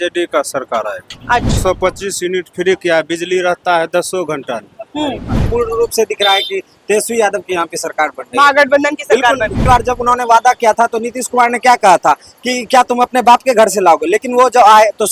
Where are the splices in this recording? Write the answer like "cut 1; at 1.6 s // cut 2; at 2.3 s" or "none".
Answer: cut 1; at 1.6 s // cut 2; at 5.4 s // cut 3; at 9.6 s

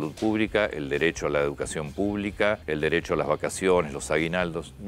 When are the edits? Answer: cut 1; at 2.6 s

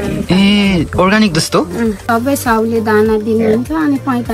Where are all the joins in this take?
cut 1; at 2.2 s

